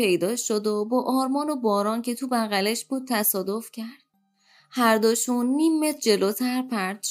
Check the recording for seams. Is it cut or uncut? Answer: uncut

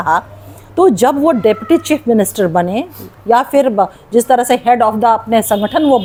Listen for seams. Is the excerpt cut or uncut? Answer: uncut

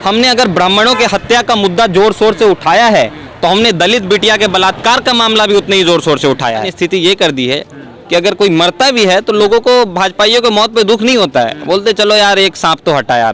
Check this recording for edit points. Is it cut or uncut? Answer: cut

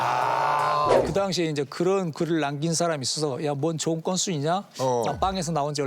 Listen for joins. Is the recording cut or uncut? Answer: cut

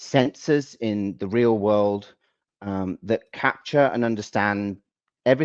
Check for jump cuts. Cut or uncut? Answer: uncut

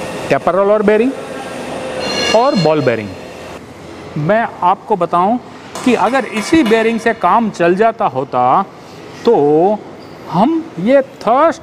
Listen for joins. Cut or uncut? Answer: cut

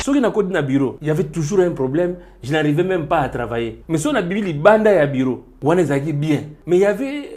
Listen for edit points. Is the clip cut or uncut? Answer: cut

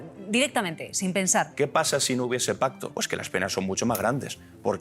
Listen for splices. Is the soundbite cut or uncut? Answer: cut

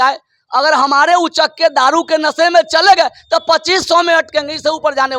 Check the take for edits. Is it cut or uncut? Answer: uncut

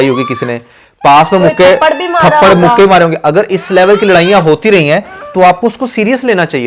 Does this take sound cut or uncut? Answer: uncut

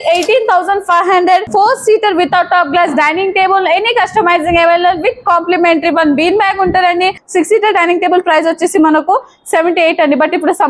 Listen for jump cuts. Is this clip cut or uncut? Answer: cut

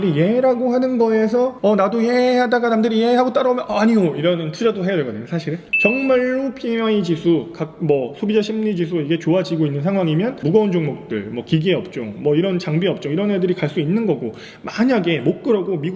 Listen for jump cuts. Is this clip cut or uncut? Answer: cut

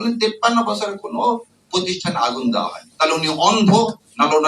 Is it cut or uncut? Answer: cut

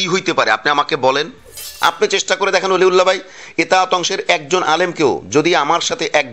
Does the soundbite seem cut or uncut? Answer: cut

